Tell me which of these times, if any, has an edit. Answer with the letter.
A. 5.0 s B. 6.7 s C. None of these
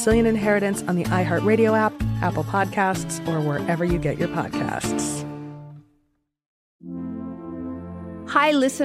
B